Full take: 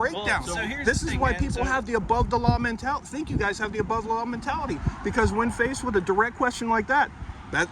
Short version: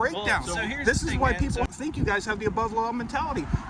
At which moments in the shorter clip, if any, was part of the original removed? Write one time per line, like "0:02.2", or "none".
0:01.7